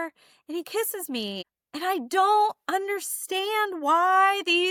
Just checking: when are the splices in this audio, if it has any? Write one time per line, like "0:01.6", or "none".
none